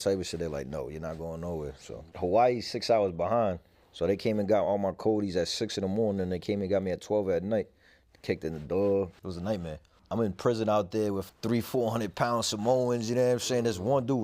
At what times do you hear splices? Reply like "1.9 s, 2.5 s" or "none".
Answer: 2.1 s, 9.1 s, 10.0 s, 11.2 s